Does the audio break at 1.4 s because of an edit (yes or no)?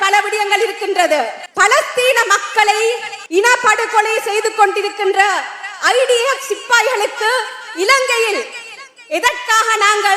yes